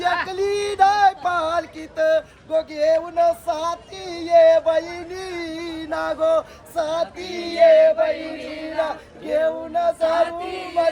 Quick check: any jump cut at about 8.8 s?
no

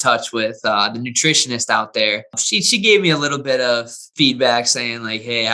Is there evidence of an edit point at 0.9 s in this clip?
no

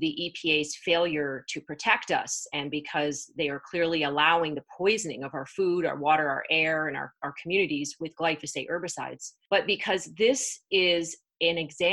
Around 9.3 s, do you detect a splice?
yes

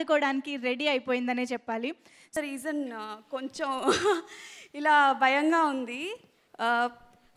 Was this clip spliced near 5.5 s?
no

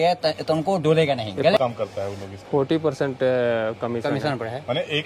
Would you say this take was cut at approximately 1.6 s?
yes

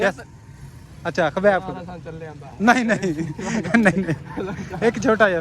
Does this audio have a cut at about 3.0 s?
yes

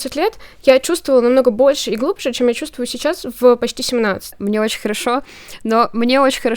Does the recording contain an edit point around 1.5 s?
no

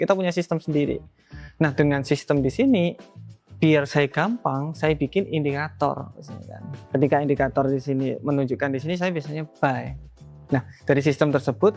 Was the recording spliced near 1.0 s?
no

